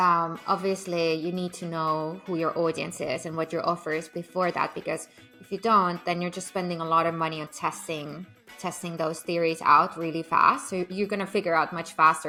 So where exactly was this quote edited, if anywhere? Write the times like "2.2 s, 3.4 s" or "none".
none